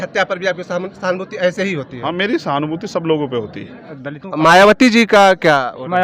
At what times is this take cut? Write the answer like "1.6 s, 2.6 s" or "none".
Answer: 4.0 s